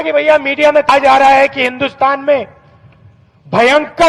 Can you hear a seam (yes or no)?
yes